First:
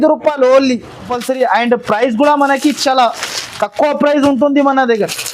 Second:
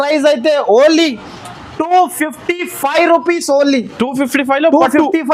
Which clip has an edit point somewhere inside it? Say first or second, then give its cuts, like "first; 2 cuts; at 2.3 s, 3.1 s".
first; 1 cut; at 1.1 s